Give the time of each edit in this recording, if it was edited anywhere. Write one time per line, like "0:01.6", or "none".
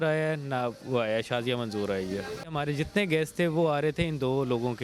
0:02.6